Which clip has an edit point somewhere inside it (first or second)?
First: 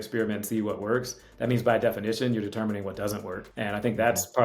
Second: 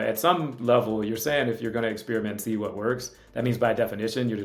first